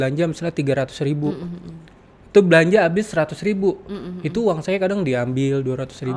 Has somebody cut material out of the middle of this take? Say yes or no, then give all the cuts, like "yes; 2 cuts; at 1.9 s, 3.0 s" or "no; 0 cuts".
no; 0 cuts